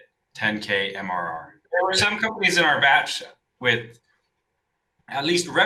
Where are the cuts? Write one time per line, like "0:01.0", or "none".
0:01.6